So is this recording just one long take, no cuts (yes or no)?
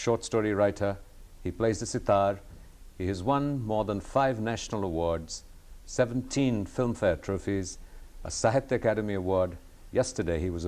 no